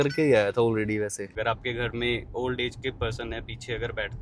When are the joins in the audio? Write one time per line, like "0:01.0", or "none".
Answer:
0:01.2